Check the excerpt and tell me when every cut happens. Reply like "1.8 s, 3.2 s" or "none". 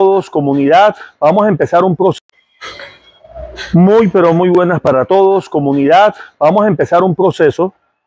2.2 s